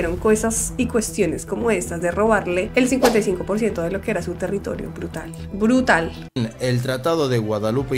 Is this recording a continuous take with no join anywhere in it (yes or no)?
yes